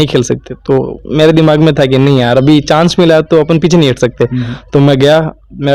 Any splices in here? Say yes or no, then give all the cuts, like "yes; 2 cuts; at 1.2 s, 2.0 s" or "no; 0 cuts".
no; 0 cuts